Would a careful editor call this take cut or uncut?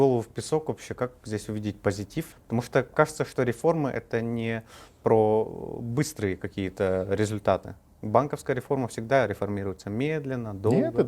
uncut